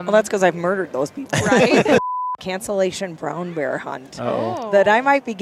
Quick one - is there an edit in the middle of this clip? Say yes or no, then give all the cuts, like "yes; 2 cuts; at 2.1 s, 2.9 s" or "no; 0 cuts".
yes; 1 cut; at 2.0 s